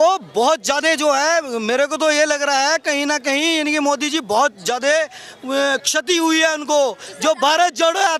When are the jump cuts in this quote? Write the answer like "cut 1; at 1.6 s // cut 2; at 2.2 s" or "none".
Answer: none

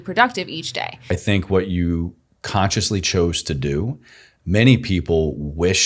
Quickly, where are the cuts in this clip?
cut 1; at 1.1 s

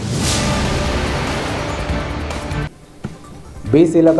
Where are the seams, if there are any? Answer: cut 1; at 2.6 s

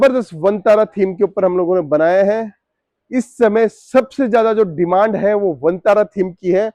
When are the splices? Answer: none

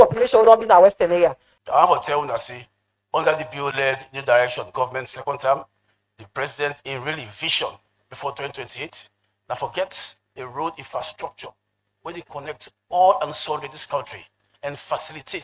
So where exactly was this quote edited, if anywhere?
cut 1; at 1.5 s

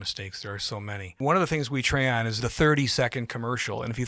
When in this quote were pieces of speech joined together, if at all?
cut 1; at 1.2 s // cut 2; at 2.4 s

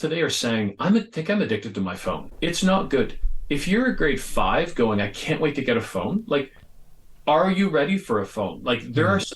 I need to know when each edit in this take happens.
cut 1; at 2.2 s

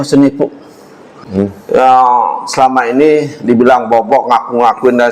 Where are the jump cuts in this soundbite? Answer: cut 1; at 1.2 s

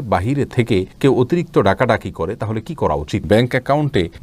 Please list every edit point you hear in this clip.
cut 1; at 3.2 s

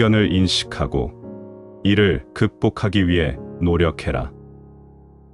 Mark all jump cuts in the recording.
none

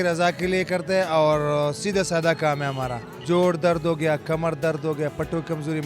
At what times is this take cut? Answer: cut 1; at 3.1 s

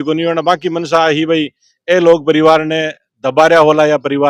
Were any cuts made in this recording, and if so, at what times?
none

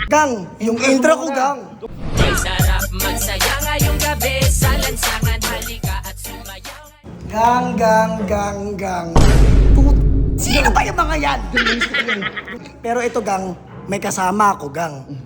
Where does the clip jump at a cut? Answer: cut 1; at 1.8 s // cut 2; at 12.5 s

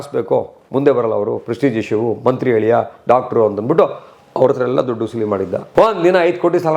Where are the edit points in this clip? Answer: cut 1; at 5.6 s

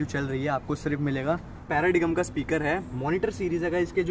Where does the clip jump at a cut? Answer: cut 1; at 1.7 s

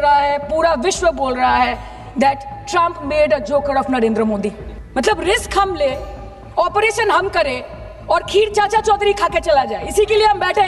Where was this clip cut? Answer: cut 1; at 4.7 s

